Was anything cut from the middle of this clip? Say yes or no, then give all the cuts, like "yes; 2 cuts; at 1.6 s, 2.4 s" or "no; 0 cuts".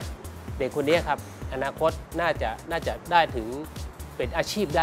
no; 0 cuts